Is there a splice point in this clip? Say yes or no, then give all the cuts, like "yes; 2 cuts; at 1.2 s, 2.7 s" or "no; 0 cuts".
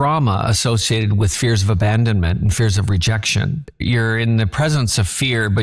yes; 1 cut; at 3.7 s